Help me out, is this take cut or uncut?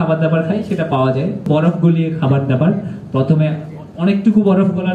cut